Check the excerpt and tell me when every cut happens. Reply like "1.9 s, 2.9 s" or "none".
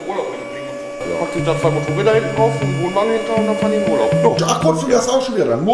1.0 s, 4.4 s

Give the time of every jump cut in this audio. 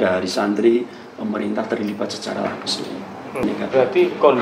3.4 s

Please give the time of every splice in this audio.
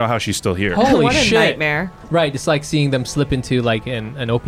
2.0 s

